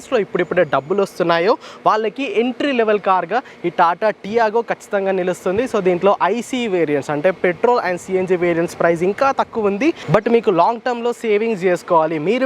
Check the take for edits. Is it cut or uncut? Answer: uncut